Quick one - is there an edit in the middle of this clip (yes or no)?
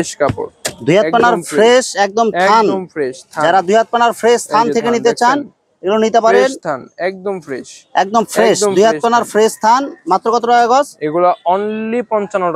no